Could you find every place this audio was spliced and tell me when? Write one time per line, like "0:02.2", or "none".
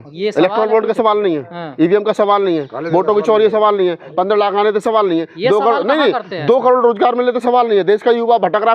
none